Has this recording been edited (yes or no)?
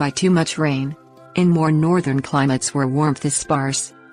yes